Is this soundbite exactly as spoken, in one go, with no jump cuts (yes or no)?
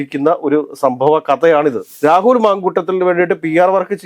no